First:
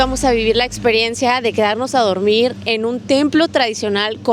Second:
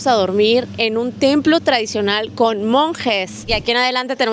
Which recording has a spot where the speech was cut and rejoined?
second; 1 cut; at 3.4 s

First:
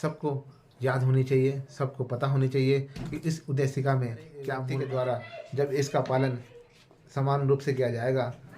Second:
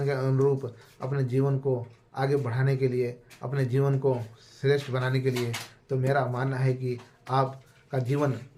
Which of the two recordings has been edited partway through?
first; 1 cut; at 4.7 s

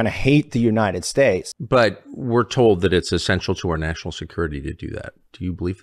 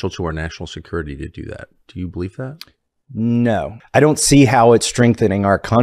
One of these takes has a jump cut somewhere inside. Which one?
first; 1 cut; at 1.5 s

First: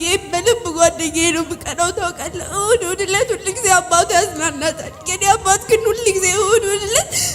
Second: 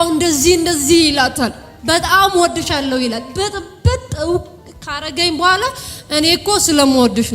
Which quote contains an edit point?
second; 1 cut; at 1.7 s

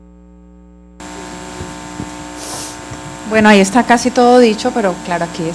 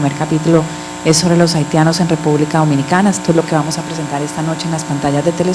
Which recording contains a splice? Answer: first; 1 cut; at 0.9 s

